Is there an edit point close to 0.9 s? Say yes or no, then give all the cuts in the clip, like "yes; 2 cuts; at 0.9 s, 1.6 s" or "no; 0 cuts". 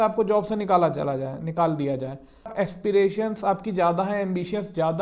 no; 1 cut; at 2.5 s